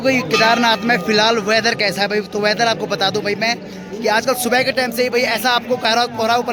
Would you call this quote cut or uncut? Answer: uncut